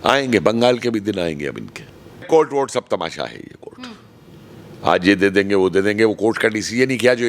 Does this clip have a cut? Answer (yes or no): yes